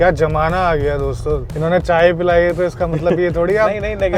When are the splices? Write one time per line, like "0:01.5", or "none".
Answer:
0:01.5

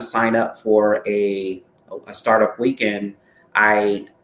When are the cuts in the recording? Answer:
none

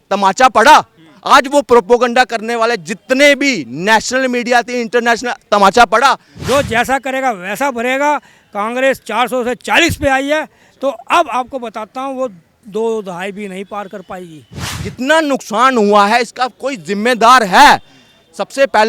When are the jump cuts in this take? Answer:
0:06.3
0:14.8

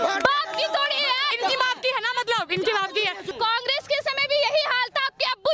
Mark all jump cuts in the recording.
0:01.3
0:03.2

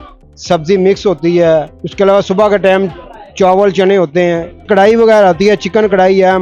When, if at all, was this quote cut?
0:01.8
0:04.6

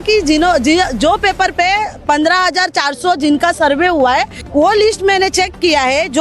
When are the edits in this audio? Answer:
0:04.4

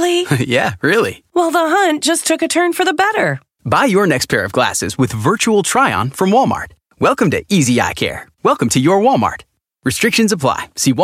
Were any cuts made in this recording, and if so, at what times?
none

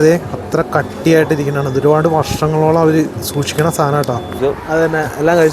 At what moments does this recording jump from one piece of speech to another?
0:04.4

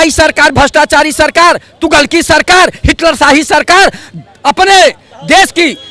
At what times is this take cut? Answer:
none

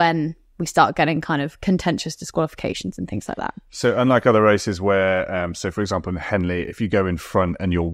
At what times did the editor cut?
none

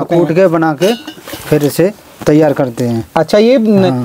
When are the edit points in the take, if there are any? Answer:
none

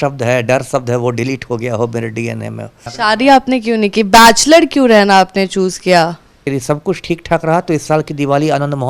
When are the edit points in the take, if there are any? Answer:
0:02.9
0:06.4

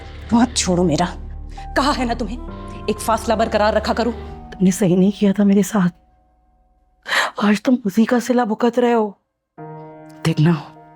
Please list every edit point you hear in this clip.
0:04.3

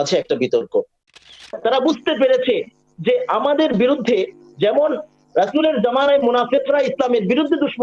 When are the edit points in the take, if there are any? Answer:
0:01.2

